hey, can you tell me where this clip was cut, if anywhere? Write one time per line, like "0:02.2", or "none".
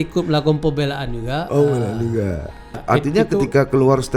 0:02.8